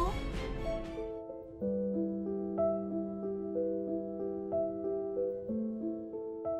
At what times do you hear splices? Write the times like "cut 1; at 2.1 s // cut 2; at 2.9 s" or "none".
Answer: cut 1; at 5.5 s